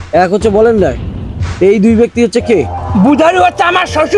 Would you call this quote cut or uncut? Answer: uncut